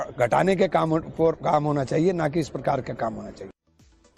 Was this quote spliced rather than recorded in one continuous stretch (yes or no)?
no